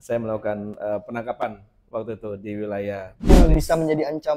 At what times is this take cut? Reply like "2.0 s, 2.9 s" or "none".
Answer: 3.3 s